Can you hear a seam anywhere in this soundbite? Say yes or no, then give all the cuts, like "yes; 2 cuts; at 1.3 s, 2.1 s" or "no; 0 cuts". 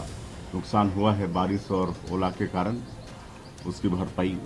no; 0 cuts